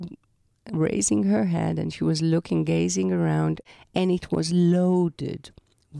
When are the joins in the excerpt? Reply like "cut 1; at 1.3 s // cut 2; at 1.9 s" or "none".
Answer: cut 1; at 3.6 s